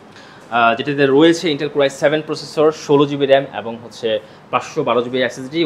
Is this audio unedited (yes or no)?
yes